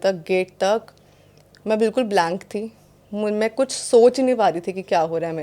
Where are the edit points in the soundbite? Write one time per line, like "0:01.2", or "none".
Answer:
none